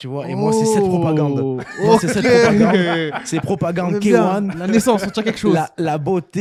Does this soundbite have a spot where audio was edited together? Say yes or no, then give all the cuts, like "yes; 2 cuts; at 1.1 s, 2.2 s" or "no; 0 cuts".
no; 0 cuts